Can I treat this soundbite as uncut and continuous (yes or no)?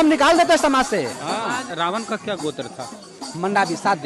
no